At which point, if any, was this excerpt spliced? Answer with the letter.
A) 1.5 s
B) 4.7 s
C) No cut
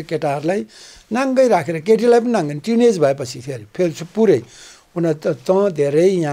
C